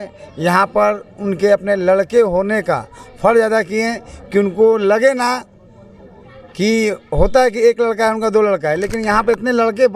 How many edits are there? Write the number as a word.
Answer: zero